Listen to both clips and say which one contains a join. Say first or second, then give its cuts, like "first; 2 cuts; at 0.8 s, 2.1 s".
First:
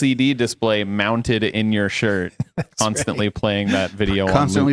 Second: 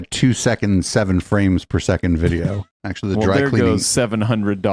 second; 1 cut; at 2.6 s